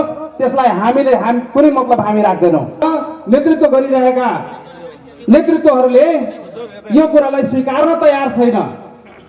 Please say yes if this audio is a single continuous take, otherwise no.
no